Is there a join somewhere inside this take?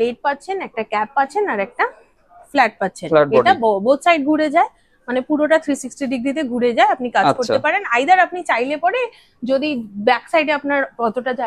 no; 0 cuts

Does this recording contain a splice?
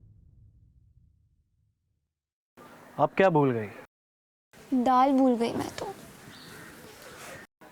no; 0 cuts

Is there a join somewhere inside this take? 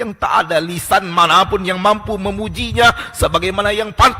no; 0 cuts

